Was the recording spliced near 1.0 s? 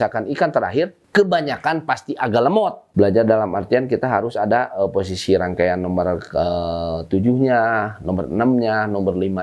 yes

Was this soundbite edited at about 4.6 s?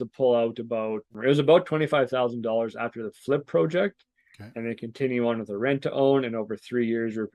no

